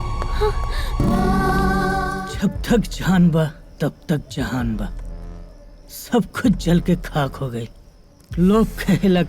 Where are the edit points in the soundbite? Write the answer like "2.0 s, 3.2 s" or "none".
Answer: 2.1 s

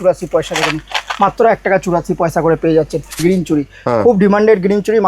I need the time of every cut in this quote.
3.2 s

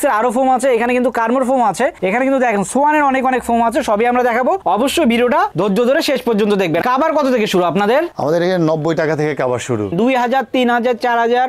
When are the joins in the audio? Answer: 6.8 s, 9.9 s

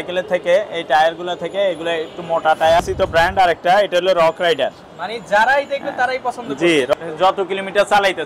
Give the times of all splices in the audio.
2.8 s, 6.9 s

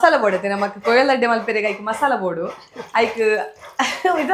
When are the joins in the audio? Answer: none

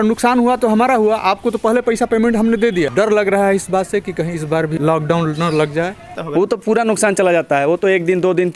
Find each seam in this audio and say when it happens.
2.9 s, 4.7 s, 6.2 s

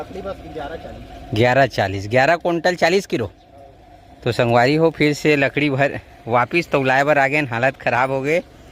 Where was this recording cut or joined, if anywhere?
none

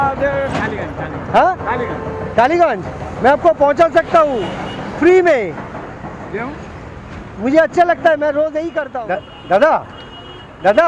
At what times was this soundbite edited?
8.9 s

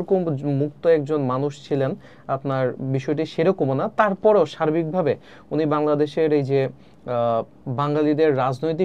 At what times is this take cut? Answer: none

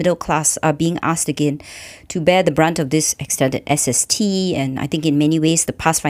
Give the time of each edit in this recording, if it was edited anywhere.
none

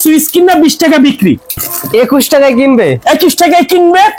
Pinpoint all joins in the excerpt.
1.6 s

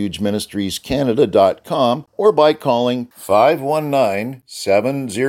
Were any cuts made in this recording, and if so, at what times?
2.1 s

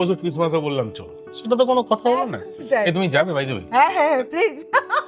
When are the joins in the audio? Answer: none

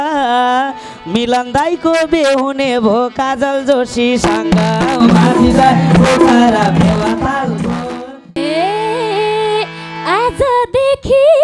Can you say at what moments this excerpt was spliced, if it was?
8.4 s

